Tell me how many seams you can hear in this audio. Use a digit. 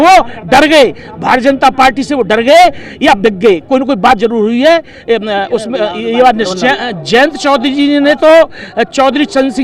1